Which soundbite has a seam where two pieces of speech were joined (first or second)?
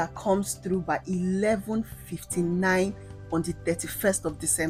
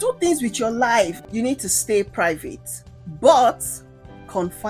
second